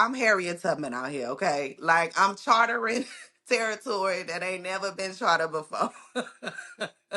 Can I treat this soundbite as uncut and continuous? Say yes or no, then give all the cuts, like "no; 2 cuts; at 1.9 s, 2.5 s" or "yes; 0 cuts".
yes; 0 cuts